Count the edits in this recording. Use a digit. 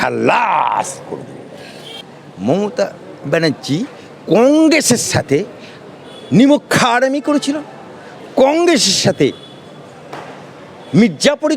1